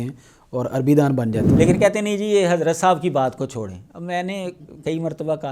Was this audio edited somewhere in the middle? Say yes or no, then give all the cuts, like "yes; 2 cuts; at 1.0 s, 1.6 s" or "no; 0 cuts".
yes; 1 cut; at 1.5 s